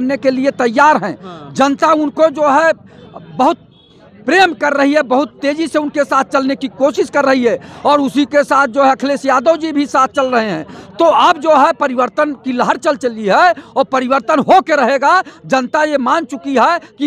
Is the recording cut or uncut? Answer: uncut